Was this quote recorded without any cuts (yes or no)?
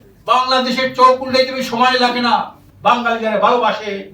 no